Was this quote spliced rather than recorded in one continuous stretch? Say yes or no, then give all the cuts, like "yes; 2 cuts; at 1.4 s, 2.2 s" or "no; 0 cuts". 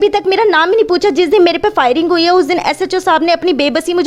no; 0 cuts